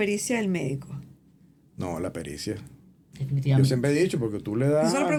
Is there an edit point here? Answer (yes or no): no